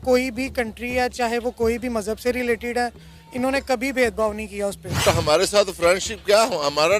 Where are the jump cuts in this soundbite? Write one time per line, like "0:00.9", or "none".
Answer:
0:05.0